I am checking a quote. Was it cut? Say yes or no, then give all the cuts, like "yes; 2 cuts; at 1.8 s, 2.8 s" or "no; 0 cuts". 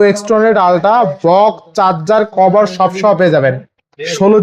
no; 0 cuts